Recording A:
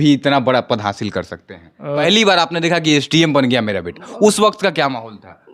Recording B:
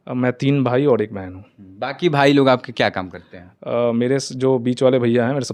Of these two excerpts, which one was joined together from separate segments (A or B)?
A